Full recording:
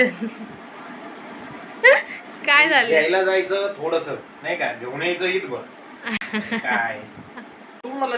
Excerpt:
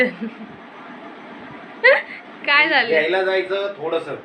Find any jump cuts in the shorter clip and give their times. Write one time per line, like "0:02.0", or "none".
none